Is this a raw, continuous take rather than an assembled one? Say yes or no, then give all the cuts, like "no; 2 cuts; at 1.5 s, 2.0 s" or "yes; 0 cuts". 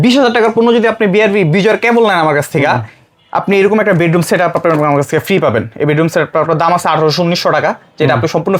yes; 0 cuts